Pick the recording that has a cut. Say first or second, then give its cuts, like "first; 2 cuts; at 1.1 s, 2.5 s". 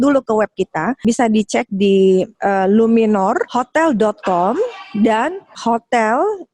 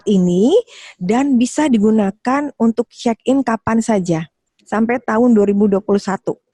first; 4 cuts; at 1.0 s, 2.3 s, 3.5 s, 5.5 s